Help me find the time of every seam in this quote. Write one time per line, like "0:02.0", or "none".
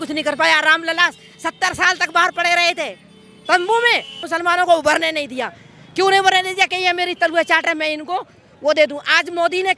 0:04.2